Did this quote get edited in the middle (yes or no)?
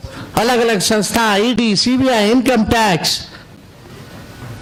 no